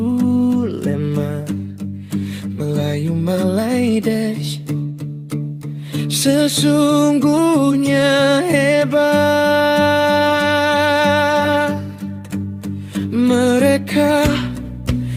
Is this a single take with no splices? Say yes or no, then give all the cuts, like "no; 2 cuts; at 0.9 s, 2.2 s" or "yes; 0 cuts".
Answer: yes; 0 cuts